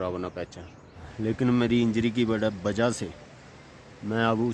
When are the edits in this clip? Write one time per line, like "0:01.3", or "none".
0:01.0